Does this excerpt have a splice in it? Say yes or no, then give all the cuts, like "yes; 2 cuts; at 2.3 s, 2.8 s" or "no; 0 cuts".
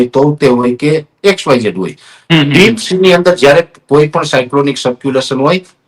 no; 0 cuts